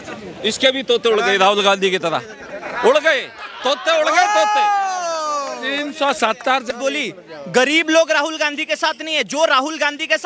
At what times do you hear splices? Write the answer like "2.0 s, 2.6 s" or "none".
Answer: 6.7 s